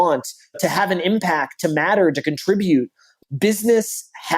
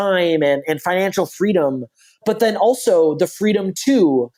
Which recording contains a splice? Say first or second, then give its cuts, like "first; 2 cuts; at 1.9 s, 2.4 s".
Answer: first; 1 cut; at 3.1 s